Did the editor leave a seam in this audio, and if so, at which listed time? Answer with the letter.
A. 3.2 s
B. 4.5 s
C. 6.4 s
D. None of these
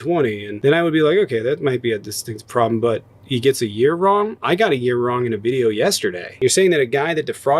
C